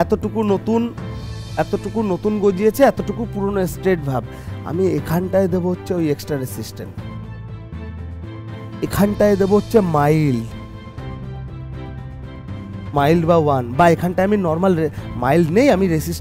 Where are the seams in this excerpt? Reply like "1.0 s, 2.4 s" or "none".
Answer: none